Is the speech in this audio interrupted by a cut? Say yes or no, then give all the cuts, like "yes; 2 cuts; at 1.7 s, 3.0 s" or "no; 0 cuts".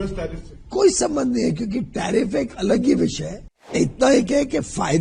yes; 1 cut; at 3.7 s